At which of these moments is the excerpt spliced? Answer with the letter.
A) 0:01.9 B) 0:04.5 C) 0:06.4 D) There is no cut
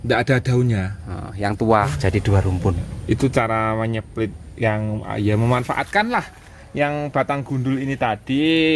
A